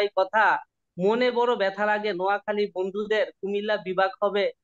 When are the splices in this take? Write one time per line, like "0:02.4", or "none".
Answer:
none